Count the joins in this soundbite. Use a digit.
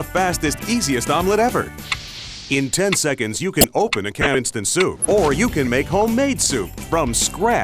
1